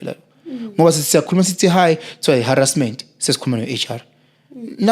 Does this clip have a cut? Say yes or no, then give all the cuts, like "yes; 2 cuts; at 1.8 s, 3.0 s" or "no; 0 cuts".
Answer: no; 0 cuts